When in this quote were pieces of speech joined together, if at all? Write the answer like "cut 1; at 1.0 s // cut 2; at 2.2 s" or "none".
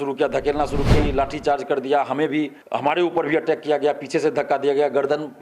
cut 1; at 0.9 s // cut 2; at 2.6 s